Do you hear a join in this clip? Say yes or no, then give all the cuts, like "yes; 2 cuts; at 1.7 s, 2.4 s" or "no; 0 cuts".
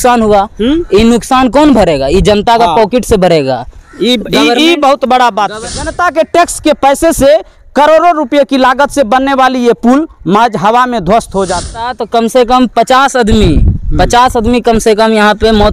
yes; 2 cuts; at 5.6 s, 12.0 s